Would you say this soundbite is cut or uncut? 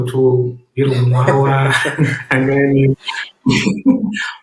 uncut